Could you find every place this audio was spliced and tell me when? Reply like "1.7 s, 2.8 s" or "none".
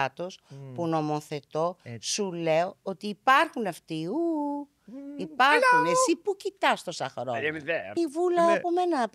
8.0 s